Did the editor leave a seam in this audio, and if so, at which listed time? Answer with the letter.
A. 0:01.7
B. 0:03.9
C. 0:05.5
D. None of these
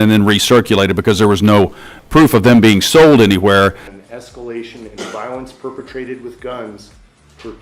B